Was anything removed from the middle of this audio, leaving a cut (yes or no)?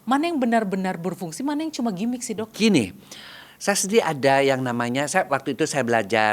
no